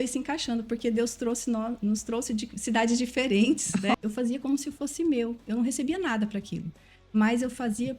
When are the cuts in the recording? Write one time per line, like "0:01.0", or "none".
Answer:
0:03.9